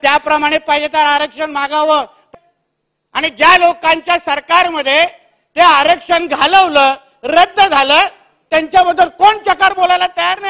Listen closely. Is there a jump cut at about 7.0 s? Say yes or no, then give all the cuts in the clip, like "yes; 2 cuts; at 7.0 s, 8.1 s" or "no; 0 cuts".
no; 1 cut; at 2.3 s